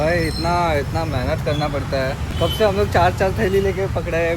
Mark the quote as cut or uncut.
cut